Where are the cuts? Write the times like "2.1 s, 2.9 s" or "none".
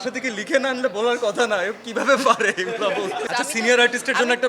3.2 s